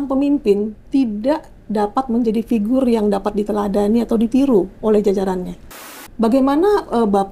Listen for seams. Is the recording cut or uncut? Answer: cut